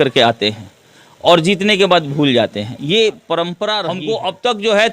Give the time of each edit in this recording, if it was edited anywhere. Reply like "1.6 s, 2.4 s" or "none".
3.9 s